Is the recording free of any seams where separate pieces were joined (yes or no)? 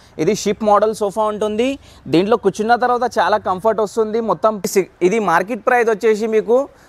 no